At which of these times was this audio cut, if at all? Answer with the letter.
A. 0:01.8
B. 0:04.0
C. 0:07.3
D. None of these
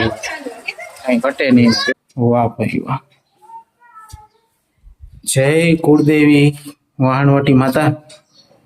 A